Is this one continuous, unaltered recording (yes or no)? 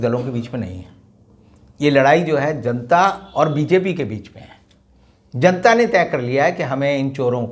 yes